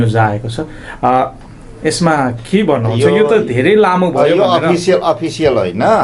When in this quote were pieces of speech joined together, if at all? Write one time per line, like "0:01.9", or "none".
none